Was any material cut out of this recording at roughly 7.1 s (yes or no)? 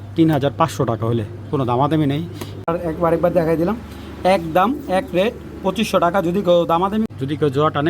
yes